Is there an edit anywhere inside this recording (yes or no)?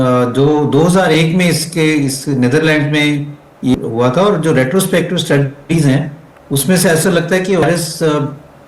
yes